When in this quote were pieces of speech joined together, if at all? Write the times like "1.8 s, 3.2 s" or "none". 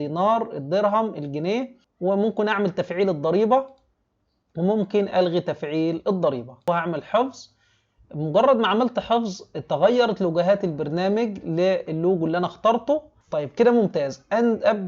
1.8 s, 6.7 s, 13.2 s